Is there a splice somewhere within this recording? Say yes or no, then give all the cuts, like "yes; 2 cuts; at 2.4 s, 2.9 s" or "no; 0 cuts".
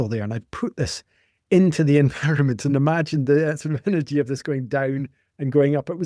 no; 0 cuts